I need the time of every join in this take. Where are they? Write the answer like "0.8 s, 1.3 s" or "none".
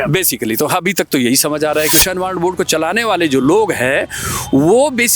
1.9 s